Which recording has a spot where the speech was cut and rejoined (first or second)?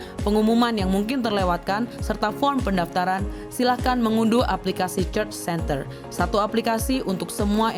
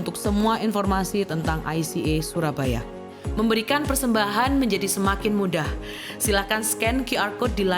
second